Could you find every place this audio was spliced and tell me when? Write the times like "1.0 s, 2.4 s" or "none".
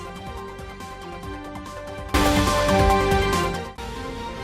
1.1 s